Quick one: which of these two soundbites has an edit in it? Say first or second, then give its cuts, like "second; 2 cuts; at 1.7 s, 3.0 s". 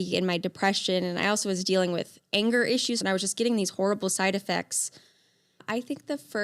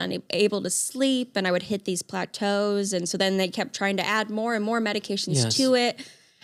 first; 2 cuts; at 3.0 s, 5.6 s